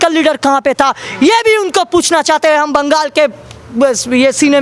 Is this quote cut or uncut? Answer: uncut